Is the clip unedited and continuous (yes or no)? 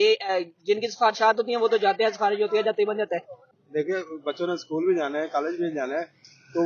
no